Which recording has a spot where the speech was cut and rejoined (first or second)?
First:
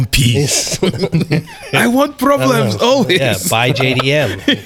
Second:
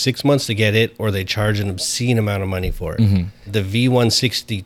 second